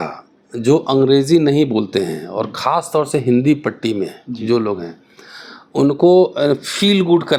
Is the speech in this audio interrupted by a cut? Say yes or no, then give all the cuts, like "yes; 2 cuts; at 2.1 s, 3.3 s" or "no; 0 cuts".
no; 0 cuts